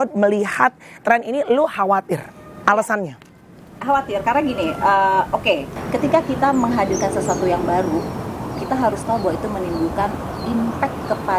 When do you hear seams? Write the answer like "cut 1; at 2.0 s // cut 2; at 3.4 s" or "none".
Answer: cut 1; at 5.7 s